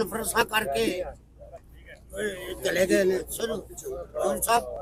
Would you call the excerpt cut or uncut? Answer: uncut